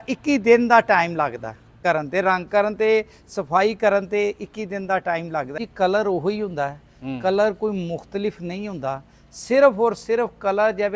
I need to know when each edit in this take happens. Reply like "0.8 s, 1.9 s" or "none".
1.8 s, 5.6 s